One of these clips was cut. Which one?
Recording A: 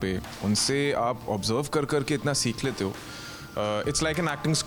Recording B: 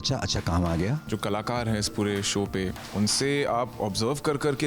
B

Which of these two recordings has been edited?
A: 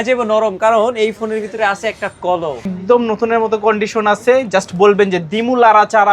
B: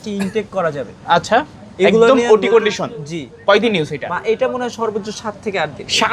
A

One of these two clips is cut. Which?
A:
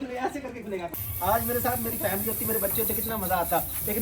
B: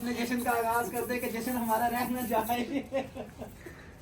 A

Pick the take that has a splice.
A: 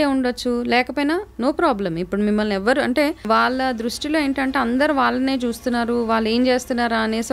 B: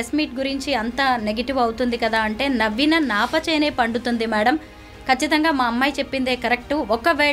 A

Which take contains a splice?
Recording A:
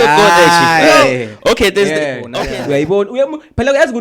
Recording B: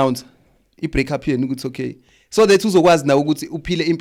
A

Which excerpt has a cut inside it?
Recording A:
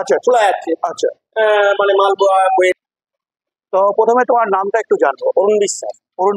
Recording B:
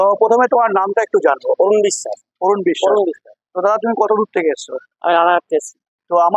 A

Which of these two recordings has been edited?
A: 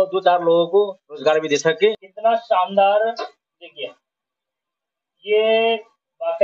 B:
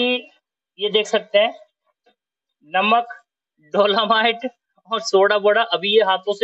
A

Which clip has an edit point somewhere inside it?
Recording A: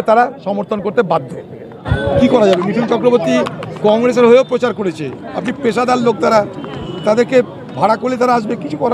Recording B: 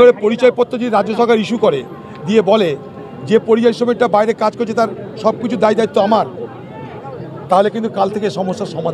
A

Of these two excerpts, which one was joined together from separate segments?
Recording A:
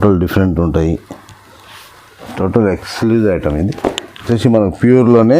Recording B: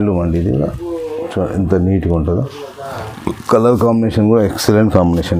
A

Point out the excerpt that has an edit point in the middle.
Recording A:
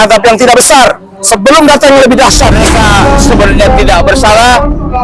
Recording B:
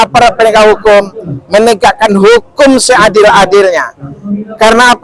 A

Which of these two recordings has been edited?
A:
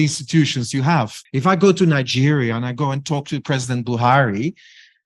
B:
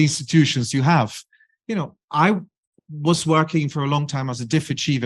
A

